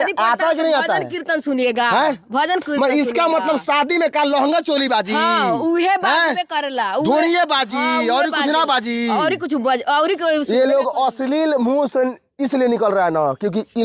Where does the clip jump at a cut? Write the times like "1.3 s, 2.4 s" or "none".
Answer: none